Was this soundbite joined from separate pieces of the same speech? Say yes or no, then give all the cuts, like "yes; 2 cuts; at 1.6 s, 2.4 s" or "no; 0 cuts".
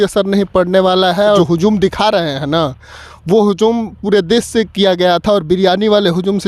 yes; 1 cut; at 1.4 s